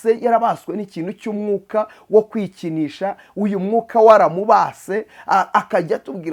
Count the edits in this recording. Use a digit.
0